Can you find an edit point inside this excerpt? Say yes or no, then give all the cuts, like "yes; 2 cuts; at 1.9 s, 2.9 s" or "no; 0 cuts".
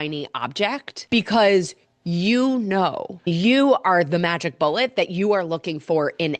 yes; 2 cuts; at 0.9 s, 3.3 s